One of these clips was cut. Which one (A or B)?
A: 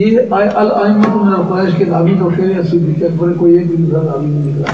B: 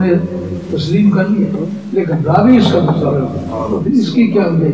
B